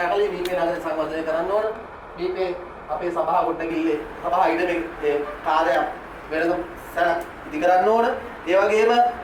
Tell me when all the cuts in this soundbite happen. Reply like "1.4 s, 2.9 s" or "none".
none